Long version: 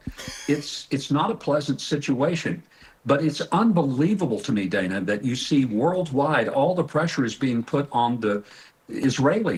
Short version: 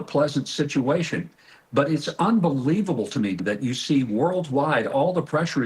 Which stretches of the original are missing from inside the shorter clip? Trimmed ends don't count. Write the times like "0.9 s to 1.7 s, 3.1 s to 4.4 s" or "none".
4.7 s to 5.0 s